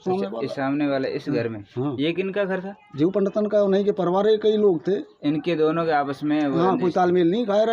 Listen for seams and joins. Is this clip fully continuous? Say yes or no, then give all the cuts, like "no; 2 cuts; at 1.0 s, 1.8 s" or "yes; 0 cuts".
yes; 0 cuts